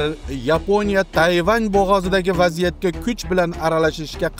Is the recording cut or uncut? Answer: cut